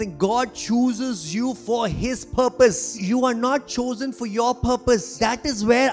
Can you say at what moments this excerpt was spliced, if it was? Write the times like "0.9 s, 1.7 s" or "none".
2.9 s, 5.2 s